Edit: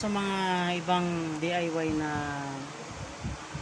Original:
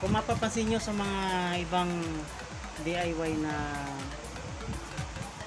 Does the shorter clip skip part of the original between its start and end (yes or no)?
yes